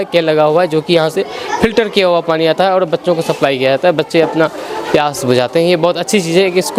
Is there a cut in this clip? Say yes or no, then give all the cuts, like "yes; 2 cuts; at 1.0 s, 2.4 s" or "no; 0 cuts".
no; 0 cuts